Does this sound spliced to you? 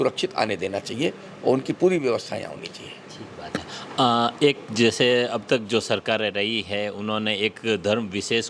no; 0 cuts

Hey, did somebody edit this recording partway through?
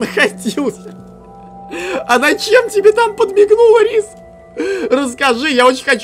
no; 0 cuts

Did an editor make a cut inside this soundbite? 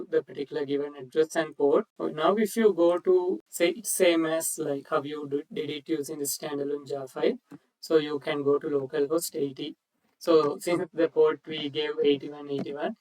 yes; 2 cuts; at 1.9 s, 3.5 s

